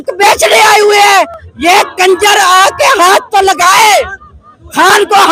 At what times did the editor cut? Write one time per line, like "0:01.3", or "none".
none